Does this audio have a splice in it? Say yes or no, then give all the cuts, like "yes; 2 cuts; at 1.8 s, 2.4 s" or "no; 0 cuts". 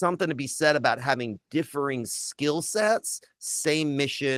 no; 0 cuts